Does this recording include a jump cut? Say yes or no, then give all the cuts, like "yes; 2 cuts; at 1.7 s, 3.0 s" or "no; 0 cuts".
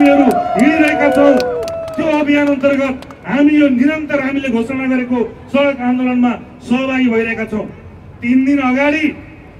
no; 0 cuts